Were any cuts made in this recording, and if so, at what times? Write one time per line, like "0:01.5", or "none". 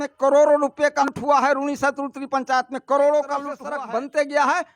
0:01.1
0:03.5